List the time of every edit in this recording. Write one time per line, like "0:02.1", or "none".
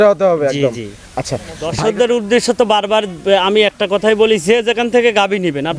0:01.7